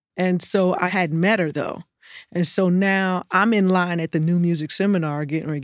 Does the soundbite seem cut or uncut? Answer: cut